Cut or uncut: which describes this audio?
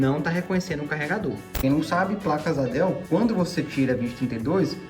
cut